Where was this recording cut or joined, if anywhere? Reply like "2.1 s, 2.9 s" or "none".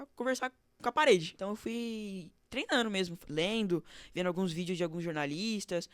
1.3 s